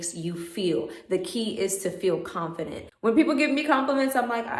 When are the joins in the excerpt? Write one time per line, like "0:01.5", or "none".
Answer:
0:02.8